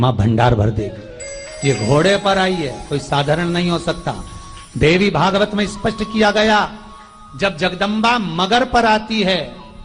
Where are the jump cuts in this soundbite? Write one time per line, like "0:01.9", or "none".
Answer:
none